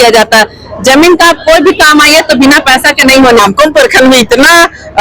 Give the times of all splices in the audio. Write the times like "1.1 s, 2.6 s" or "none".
3.4 s